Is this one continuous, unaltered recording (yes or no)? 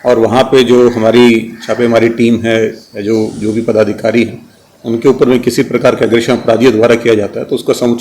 yes